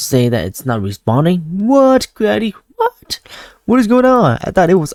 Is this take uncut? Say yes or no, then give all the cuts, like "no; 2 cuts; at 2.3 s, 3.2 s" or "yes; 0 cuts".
yes; 0 cuts